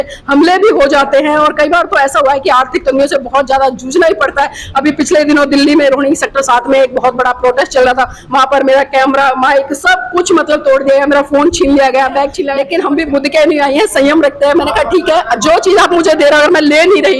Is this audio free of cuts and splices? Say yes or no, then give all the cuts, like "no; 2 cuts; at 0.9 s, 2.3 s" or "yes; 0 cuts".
no; 1 cut; at 12.5 s